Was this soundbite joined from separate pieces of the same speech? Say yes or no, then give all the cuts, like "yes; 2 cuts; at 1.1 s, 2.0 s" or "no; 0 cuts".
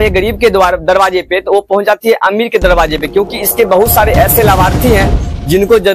no; 0 cuts